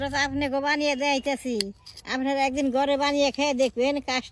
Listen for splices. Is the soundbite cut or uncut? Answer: uncut